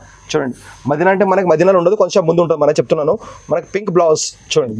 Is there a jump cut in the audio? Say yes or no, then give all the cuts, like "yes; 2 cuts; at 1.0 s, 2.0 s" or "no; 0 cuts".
no; 0 cuts